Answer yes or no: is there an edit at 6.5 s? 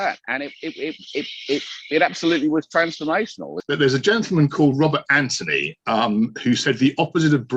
no